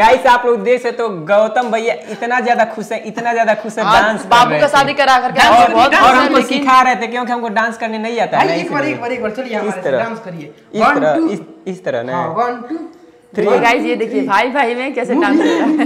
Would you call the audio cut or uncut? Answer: uncut